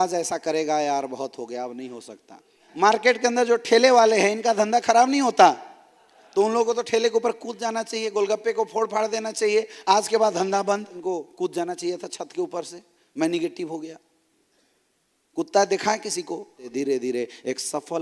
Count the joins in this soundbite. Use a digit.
3